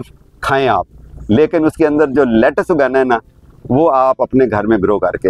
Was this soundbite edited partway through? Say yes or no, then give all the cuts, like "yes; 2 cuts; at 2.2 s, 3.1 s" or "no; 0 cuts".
no; 0 cuts